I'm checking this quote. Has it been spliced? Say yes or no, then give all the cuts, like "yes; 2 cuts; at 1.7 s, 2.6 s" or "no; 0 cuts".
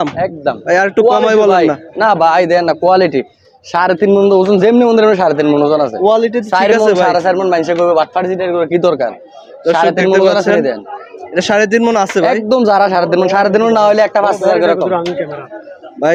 no; 0 cuts